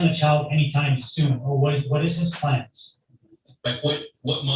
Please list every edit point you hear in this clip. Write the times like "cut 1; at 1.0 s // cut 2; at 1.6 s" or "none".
none